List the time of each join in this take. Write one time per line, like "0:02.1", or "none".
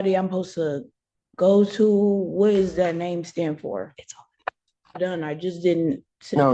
0:04.9